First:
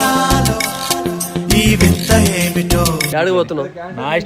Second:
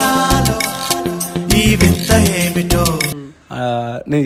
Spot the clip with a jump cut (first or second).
first